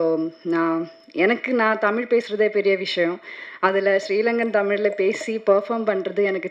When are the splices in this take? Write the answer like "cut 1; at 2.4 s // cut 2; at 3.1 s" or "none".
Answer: none